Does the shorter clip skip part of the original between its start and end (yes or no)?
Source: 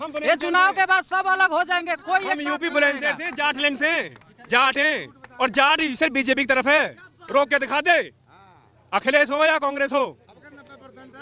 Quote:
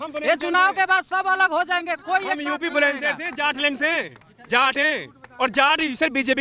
no